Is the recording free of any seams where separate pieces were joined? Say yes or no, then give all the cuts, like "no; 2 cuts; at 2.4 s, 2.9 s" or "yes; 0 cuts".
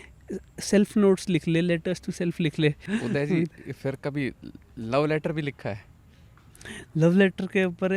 no; 1 cut; at 2.9 s